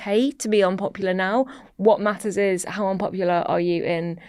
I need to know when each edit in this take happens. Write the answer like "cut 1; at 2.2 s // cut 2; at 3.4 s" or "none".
none